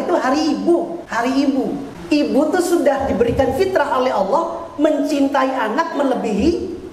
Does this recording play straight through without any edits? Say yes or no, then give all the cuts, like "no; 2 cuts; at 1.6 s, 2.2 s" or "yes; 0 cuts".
no; 2 cuts; at 1.0 s, 1.9 s